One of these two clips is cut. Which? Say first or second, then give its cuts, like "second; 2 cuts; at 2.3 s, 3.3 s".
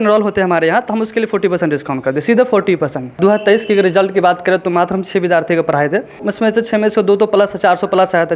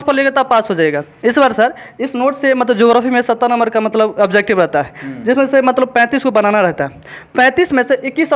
first; 2 cuts; at 3.2 s, 6.2 s